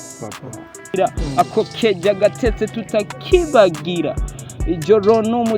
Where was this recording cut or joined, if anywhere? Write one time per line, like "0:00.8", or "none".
0:00.9

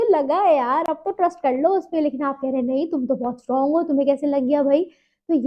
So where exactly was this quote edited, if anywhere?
none

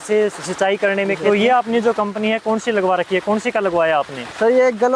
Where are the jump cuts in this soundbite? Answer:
0:01.2

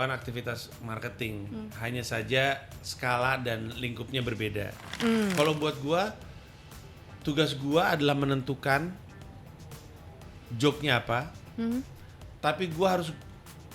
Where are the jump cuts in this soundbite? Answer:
0:04.8

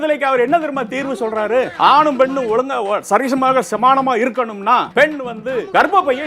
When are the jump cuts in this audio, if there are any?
0:01.7
0:05.1

